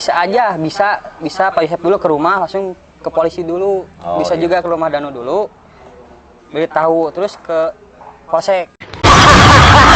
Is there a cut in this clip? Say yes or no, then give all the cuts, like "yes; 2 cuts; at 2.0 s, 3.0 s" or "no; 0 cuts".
yes; 1 cut; at 9.0 s